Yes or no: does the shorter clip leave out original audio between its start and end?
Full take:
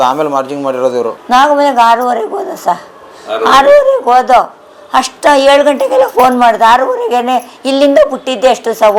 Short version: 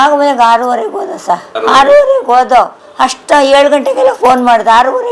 yes